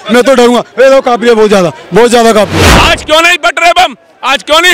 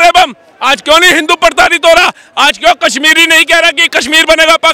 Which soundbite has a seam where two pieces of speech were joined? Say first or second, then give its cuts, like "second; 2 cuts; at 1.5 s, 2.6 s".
first; 1 cut; at 2.7 s